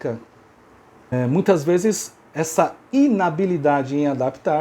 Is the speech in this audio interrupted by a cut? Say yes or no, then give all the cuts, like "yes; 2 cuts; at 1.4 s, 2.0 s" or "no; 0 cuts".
yes; 2 cuts; at 1.1 s, 2.8 s